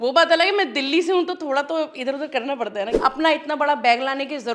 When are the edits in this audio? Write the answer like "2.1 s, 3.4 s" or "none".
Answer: 2.9 s